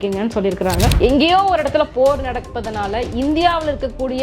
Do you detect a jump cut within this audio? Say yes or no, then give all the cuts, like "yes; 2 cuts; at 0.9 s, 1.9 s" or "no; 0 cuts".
yes; 1 cut; at 0.9 s